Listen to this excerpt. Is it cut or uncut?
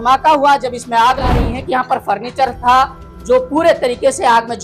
cut